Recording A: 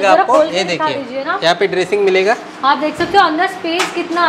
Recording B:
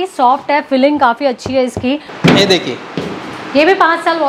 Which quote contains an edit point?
B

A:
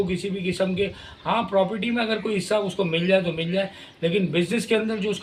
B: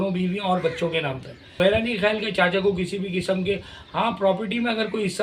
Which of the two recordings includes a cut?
B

